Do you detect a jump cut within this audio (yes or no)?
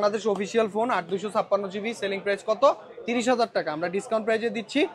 no